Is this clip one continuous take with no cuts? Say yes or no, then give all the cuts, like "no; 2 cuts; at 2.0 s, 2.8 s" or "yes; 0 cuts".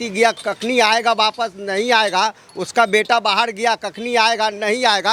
yes; 0 cuts